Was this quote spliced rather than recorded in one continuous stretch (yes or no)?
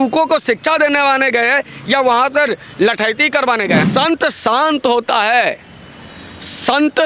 yes